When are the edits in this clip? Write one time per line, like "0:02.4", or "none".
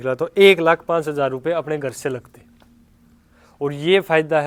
none